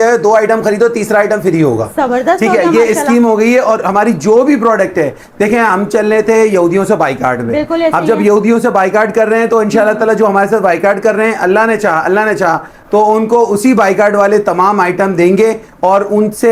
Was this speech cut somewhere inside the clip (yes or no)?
no